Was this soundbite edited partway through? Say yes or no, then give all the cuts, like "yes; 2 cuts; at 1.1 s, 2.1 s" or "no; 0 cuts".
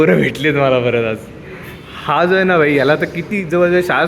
no; 0 cuts